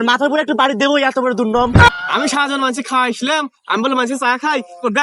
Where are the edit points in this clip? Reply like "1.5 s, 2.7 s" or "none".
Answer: 1.9 s